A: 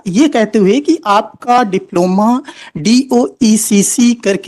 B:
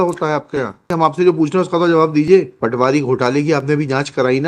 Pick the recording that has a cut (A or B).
B